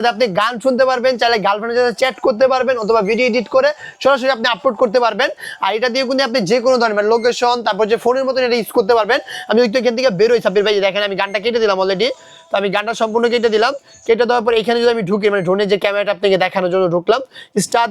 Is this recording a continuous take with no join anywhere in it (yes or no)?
yes